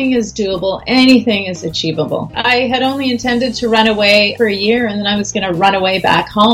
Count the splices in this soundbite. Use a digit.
2